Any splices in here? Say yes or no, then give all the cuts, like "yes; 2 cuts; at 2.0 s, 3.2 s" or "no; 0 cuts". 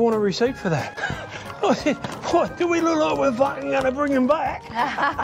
yes; 1 cut; at 1.0 s